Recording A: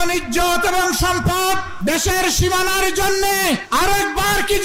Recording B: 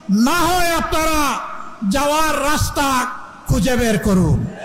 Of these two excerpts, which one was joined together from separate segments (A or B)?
A